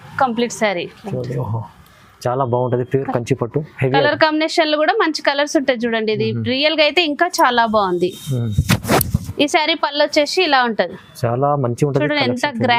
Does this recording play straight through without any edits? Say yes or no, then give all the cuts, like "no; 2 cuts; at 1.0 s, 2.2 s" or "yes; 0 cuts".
yes; 0 cuts